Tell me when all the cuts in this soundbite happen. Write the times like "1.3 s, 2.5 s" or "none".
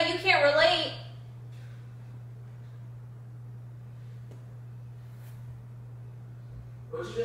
none